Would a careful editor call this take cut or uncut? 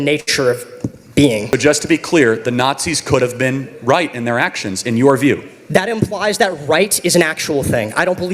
cut